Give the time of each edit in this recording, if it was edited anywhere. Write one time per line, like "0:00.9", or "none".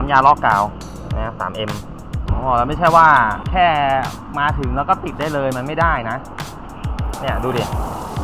0:02.2
0:03.4